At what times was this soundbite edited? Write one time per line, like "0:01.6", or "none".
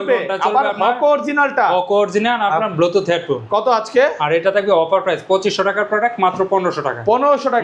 none